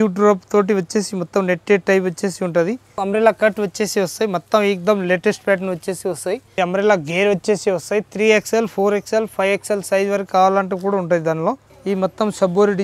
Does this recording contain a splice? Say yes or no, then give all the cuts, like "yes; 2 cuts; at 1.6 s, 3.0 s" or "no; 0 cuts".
yes; 3 cuts; at 2.9 s, 6.6 s, 11.7 s